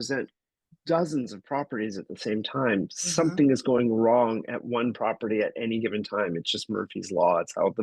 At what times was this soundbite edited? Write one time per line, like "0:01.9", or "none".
none